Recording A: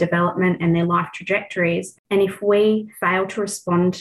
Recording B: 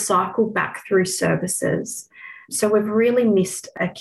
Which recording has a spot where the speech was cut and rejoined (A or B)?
A